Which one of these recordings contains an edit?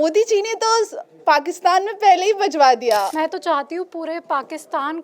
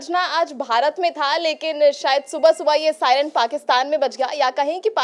first; 1 cut; at 3.1 s

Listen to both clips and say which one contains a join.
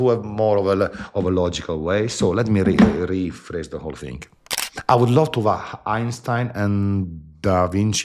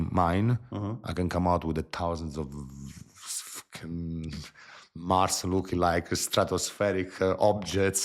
first; 1 cut; at 4.3 s

